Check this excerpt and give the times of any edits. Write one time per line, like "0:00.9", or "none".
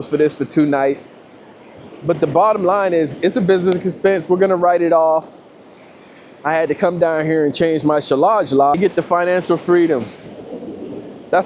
0:08.8